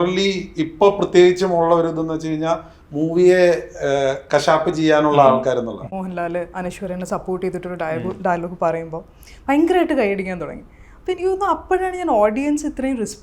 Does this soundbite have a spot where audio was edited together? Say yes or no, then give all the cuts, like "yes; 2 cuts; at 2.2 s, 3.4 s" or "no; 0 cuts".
yes; 2 cuts; at 5.8 s, 6.5 s